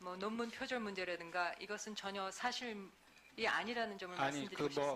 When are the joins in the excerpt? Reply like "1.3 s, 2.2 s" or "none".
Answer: 2.5 s